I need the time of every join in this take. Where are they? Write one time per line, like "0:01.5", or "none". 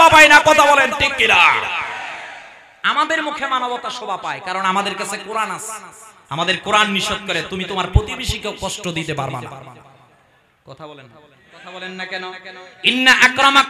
0:11.7